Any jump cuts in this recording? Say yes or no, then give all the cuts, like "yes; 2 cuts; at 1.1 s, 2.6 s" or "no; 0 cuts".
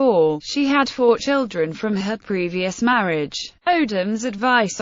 no; 0 cuts